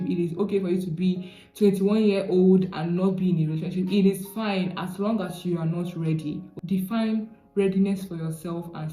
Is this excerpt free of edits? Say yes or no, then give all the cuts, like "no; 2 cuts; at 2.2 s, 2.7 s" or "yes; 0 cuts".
yes; 0 cuts